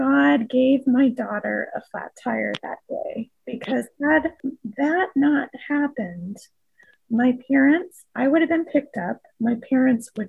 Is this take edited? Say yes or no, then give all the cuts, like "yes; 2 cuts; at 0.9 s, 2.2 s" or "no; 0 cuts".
yes; 1 cut; at 4.4 s